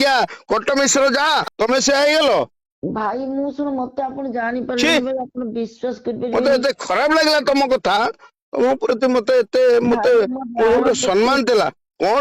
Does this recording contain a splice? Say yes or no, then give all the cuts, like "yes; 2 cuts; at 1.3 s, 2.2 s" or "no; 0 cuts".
yes; 1 cut; at 1.5 s